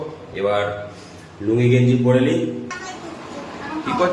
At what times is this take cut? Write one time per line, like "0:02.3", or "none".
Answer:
0:02.7